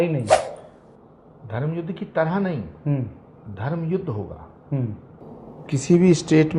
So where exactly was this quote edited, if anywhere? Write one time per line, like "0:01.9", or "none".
0:05.3